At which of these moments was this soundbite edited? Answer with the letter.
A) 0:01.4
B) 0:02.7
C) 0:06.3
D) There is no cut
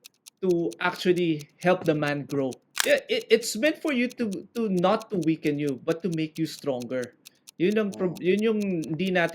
B